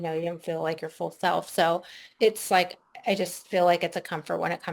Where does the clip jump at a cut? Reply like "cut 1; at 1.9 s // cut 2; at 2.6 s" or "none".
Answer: cut 1; at 2.0 s

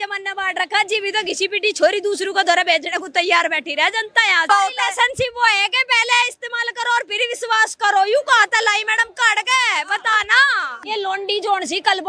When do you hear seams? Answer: cut 1; at 4.5 s // cut 2; at 10.7 s

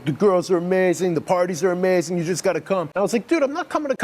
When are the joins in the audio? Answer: cut 1; at 2.9 s

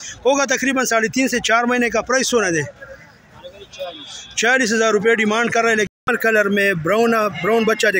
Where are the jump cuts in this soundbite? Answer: cut 1; at 6.1 s

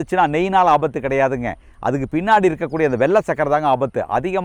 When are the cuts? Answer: none

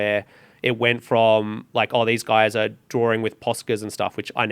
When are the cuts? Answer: none

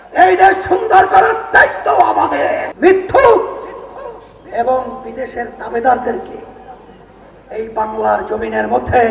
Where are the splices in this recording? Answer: cut 1; at 2.7 s

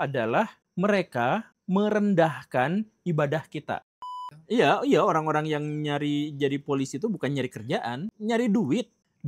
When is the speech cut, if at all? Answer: cut 1; at 3.9 s

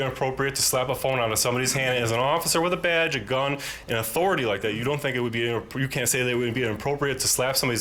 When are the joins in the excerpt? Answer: none

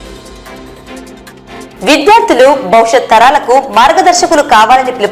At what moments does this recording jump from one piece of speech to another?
cut 1; at 1.6 s

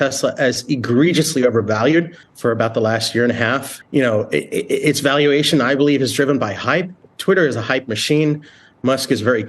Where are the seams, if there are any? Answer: cut 1; at 2.2 s // cut 2; at 3.7 s

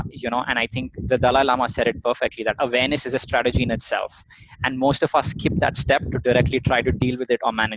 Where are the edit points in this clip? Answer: none

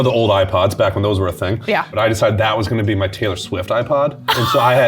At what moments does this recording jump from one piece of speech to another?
cut 1; at 1.9 s

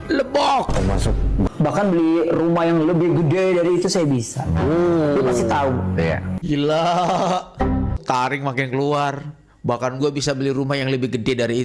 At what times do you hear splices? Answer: cut 1; at 1.5 s // cut 2; at 6.3 s // cut 3; at 8.0 s

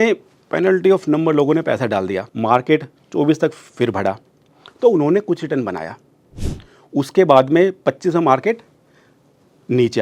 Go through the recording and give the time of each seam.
cut 1; at 2.3 s

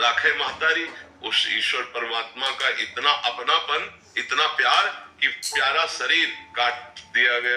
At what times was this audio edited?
cut 1; at 1.1 s // cut 2; at 6.4 s

